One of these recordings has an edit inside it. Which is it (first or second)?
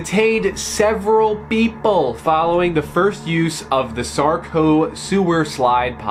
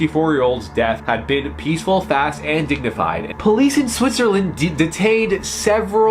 second